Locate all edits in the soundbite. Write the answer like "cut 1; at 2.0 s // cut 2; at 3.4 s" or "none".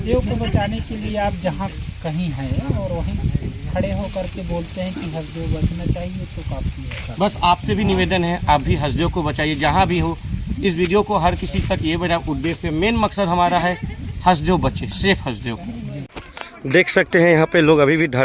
cut 1; at 16.1 s

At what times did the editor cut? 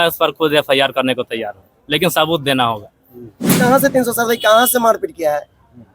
cut 1; at 3.6 s

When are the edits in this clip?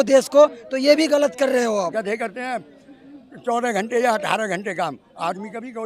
cut 1; at 2.1 s

